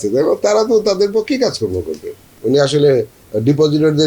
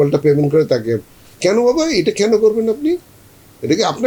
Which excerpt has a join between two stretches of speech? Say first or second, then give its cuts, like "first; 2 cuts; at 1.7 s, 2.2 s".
first; 1 cut; at 2.3 s